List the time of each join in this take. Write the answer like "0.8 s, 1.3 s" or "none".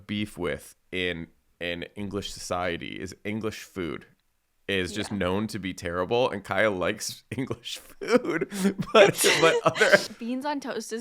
10.1 s